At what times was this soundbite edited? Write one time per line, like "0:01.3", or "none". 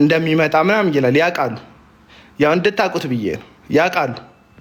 none